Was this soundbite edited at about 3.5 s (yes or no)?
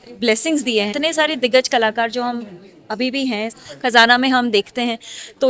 yes